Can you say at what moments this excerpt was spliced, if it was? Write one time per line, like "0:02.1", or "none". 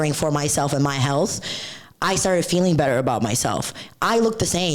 none